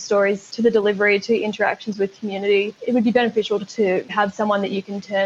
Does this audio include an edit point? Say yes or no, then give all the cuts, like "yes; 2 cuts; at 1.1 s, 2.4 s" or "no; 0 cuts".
yes; 2 cuts; at 2.8 s, 4.0 s